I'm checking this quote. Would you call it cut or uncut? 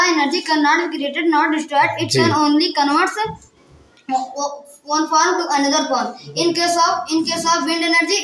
uncut